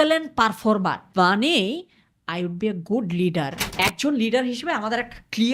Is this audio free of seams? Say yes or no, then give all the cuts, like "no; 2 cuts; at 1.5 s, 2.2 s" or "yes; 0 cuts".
no; 1 cut; at 3.6 s